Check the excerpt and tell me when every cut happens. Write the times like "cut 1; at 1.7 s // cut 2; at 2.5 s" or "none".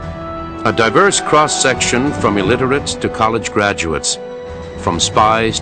cut 1; at 4.1 s